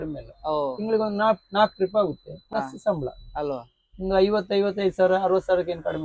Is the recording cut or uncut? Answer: uncut